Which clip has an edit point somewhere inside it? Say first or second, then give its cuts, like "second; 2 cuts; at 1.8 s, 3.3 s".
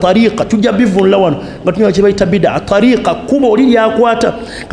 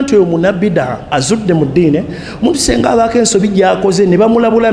second; 1 cut; at 1.0 s